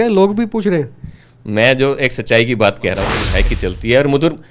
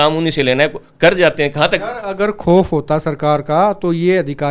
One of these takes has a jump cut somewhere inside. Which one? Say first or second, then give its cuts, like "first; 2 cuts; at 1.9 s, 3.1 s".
first; 1 cut; at 3.2 s